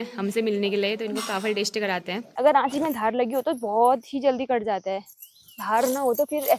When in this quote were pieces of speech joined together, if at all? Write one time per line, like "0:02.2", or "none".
0:02.2